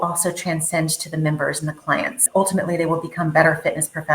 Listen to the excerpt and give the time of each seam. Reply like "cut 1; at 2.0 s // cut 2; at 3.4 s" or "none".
cut 1; at 2.2 s